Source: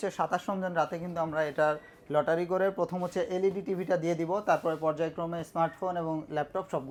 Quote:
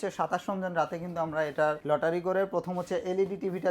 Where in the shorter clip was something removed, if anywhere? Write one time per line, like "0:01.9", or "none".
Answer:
0:01.8